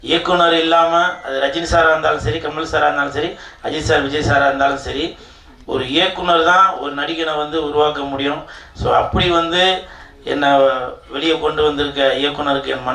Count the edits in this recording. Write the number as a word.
zero